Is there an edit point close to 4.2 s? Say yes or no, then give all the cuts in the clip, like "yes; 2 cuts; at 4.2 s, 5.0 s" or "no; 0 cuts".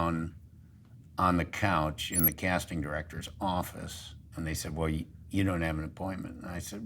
yes; 1 cut; at 4.2 s